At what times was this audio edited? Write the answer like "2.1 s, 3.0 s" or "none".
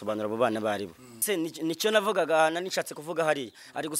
1.1 s